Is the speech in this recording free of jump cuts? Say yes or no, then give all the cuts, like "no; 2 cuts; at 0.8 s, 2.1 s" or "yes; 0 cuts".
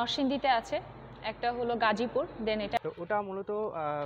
no; 1 cut; at 2.8 s